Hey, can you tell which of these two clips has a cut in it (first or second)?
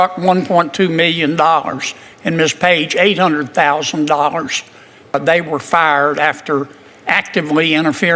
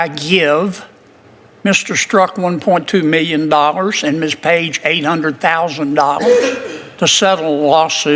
first